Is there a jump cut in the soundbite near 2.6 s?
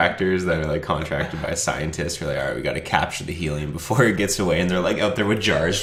no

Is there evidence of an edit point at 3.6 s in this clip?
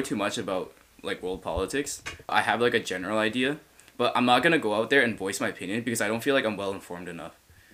no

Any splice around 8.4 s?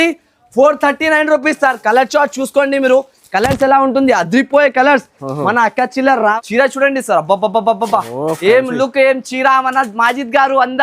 no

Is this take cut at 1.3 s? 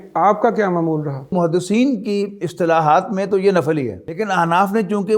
yes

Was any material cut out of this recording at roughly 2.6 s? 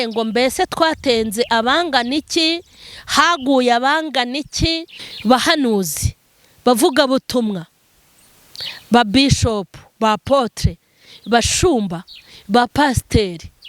no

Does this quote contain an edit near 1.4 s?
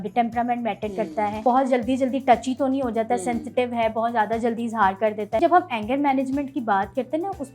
yes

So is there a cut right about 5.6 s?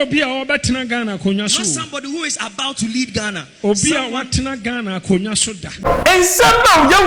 yes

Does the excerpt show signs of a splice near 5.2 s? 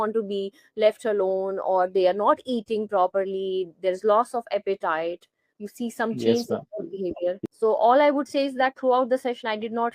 no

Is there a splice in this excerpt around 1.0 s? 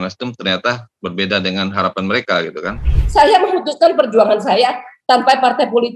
no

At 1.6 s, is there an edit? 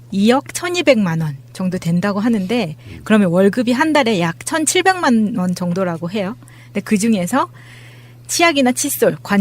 yes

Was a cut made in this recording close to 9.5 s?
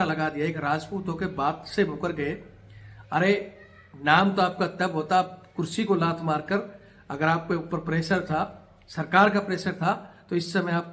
no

